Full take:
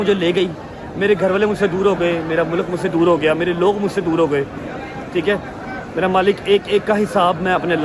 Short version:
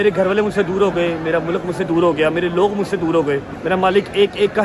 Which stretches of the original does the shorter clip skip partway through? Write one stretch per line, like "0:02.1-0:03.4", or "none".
0:04.6-0:05.8

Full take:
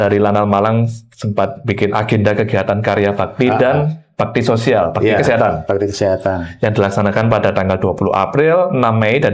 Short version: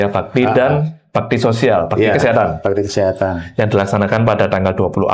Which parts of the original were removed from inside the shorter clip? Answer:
none

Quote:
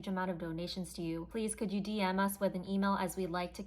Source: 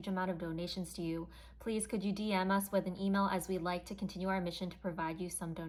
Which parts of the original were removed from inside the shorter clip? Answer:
0:01.3-0:01.6

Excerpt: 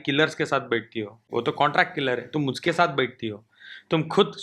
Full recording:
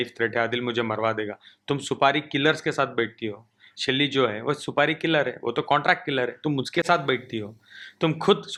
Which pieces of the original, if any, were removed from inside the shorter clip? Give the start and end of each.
0:03.5-0:05.4

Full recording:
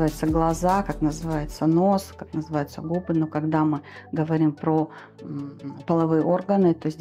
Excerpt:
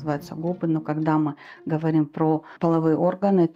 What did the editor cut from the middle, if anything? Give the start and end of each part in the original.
0:05.0-0:05.8

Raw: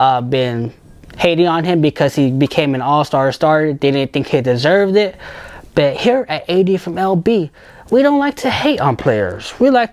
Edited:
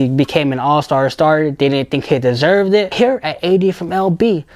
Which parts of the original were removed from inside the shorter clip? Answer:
0:05.1-0:06.0

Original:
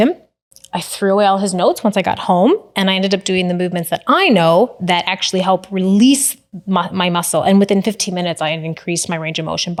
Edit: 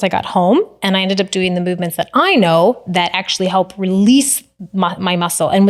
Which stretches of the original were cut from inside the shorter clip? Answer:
none

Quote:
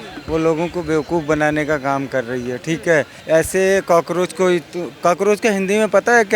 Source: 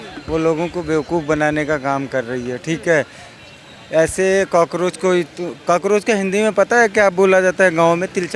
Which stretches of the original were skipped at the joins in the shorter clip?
0:03.2-0:03.8

